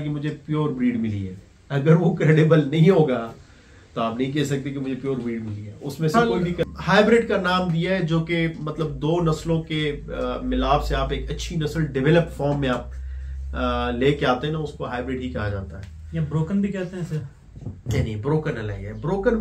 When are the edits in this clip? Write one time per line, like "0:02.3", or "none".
0:06.1